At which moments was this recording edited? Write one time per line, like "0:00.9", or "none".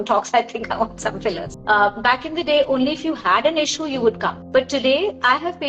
0:01.5
0:04.3